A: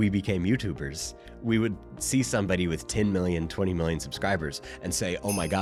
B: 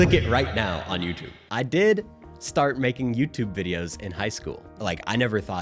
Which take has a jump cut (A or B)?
B